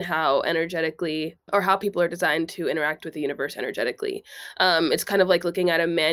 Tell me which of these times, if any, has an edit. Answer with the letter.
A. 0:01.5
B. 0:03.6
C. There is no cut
A